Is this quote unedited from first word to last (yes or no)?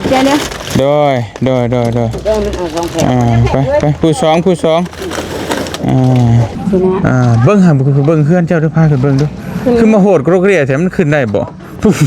no